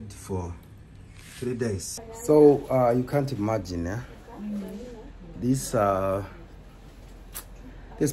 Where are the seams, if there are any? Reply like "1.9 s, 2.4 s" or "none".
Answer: 2.0 s

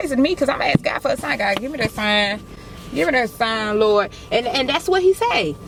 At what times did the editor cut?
none

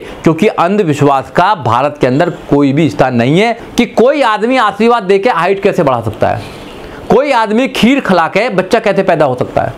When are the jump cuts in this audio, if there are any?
3.6 s

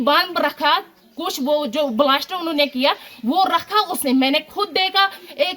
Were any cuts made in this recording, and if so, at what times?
none

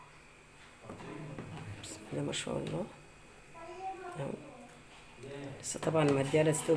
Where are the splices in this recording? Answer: none

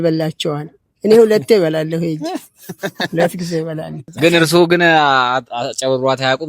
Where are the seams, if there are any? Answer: 4.0 s

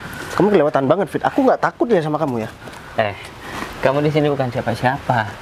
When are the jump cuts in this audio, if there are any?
none

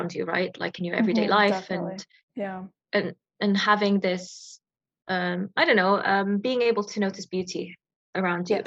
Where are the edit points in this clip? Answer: none

